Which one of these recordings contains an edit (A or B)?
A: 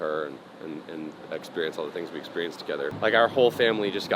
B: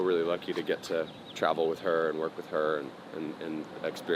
A